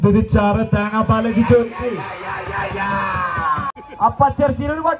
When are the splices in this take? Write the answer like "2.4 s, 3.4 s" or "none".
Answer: 3.8 s